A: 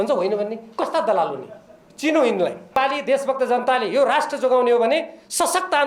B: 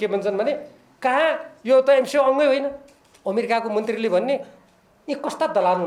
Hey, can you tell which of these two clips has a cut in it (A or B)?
A